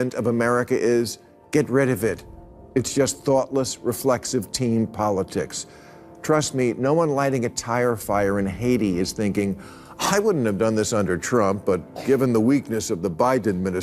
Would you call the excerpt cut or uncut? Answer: uncut